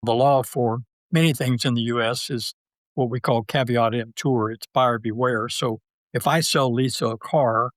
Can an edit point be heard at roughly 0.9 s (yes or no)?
yes